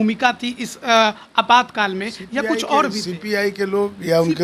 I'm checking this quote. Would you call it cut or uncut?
uncut